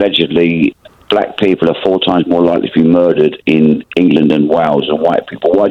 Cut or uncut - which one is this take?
uncut